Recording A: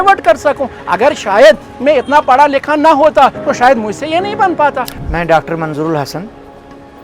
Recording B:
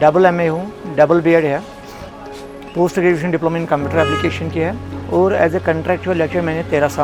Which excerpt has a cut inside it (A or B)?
A